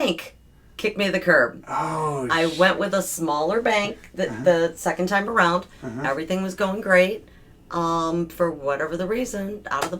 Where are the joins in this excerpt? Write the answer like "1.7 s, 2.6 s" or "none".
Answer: none